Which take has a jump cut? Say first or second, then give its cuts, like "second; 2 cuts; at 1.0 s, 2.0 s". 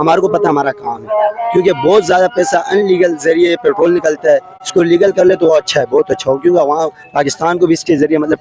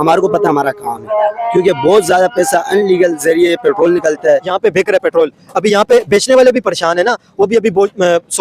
second; 1 cut; at 4.5 s